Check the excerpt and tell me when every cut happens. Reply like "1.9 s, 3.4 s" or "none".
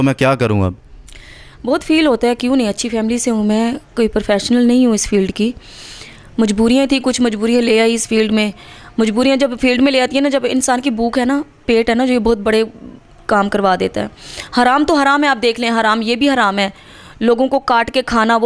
none